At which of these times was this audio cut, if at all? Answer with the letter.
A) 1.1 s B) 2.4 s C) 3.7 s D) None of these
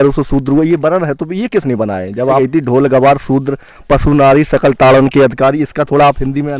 B